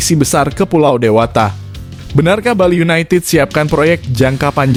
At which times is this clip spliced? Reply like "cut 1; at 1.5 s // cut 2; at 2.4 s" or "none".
none